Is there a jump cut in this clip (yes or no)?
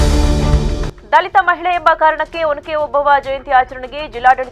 yes